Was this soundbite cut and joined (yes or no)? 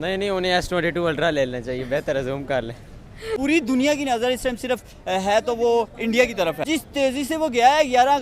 yes